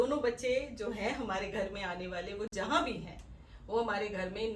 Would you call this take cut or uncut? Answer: uncut